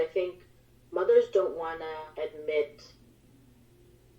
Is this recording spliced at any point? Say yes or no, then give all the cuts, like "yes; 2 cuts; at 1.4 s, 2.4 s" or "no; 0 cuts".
yes; 1 cut; at 2.1 s